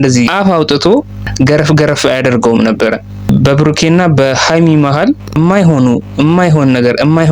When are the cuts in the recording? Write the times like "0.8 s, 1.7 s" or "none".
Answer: 1.2 s, 3.1 s, 5.3 s